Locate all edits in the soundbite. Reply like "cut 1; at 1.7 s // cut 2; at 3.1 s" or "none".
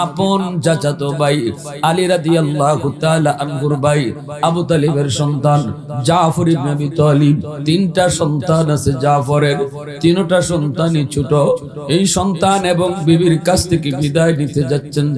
cut 1; at 7.5 s